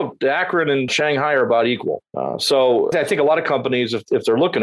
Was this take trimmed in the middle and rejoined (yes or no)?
yes